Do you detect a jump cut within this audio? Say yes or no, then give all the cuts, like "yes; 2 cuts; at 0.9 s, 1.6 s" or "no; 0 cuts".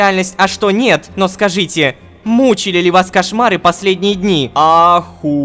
yes; 1 cut; at 4.5 s